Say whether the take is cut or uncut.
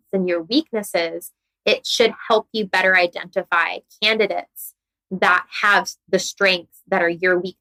uncut